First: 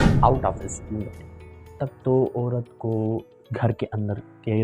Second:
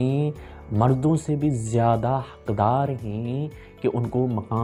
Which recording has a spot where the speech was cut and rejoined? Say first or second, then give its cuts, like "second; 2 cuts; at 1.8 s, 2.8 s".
first; 1 cut; at 1.8 s